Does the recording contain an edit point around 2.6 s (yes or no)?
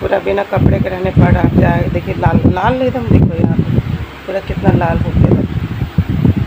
no